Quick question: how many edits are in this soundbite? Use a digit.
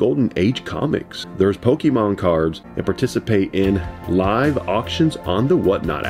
2